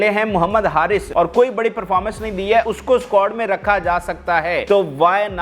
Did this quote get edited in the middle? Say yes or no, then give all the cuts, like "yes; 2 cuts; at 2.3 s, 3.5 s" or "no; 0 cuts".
yes; 3 cuts; at 1.1 s, 2.7 s, 4.6 s